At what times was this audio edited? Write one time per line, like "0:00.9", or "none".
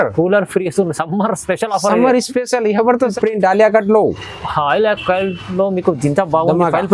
0:03.1